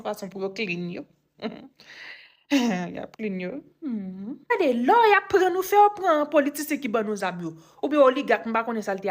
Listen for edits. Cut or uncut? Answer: cut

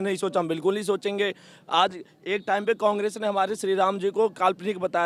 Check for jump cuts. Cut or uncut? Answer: uncut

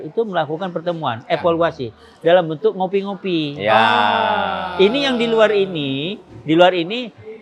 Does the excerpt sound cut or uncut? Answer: uncut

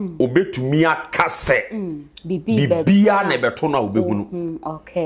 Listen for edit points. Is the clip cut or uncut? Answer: uncut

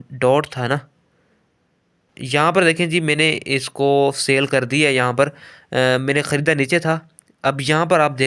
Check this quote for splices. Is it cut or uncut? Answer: cut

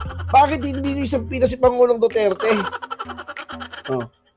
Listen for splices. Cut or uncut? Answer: uncut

